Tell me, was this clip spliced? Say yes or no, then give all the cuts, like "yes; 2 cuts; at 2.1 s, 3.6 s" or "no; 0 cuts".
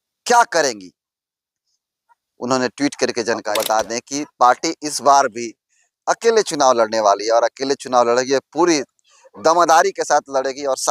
yes; 1 cut; at 3.5 s